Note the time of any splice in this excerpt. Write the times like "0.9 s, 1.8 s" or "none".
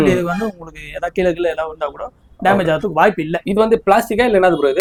none